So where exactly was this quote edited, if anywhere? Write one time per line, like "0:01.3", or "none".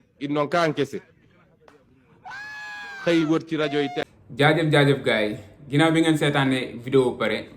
none